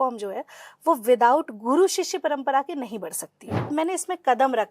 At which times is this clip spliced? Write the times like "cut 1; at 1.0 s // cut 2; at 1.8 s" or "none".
cut 1; at 3.7 s